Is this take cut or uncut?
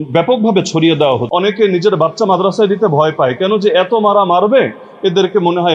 cut